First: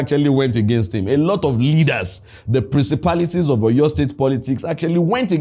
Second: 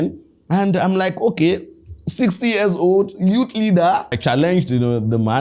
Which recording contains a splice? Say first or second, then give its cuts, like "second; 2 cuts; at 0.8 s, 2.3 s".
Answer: second; 1 cut; at 4.2 s